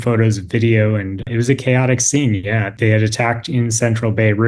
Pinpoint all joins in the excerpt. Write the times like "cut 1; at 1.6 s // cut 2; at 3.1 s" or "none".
cut 1; at 1.2 s // cut 2; at 2.7 s